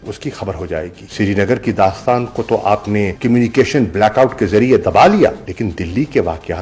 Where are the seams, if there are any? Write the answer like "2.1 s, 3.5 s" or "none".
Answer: 1.1 s